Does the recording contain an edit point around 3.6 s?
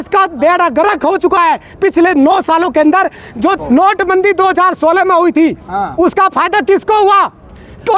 yes; 1 cut; at 3.6 s

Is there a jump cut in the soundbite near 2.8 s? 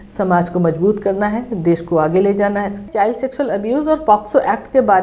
yes; 1 cut; at 2.8 s

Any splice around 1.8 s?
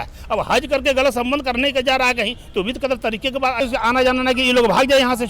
no; 1 cut; at 3.6 s

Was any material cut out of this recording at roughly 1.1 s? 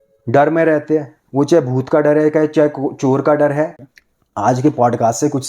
no; 1 cut; at 3.9 s

